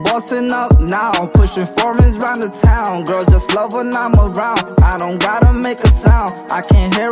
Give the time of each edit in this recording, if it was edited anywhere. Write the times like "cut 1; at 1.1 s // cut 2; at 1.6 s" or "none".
none